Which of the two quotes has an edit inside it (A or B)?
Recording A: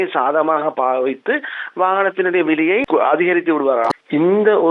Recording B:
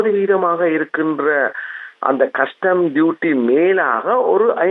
A